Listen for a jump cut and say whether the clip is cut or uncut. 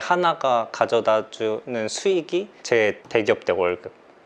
uncut